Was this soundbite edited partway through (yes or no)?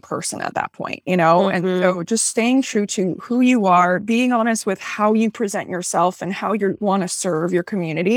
no